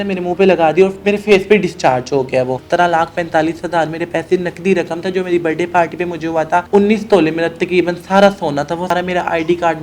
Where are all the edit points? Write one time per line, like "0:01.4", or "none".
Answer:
0:02.6
0:06.7
0:08.9